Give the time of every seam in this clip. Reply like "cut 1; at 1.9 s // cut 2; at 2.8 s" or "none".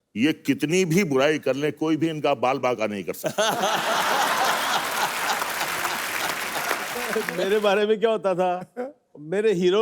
cut 1; at 7.1 s